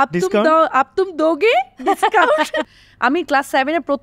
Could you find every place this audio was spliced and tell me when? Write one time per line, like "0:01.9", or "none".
0:02.7